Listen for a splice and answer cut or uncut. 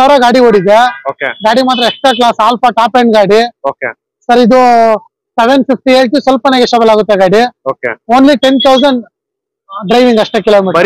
uncut